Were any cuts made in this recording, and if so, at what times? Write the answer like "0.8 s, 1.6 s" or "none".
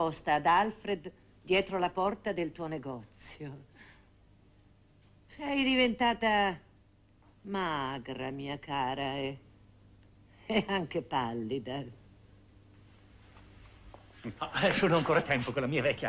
10.9 s